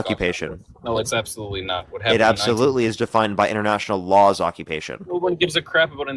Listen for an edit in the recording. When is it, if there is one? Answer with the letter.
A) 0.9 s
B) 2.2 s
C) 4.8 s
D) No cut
D